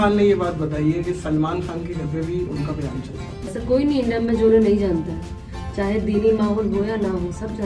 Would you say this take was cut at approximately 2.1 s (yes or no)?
no